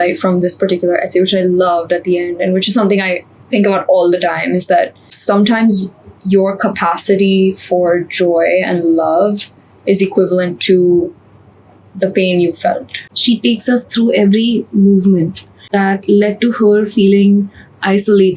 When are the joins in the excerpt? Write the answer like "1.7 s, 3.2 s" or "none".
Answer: 5.2 s, 13.0 s, 15.6 s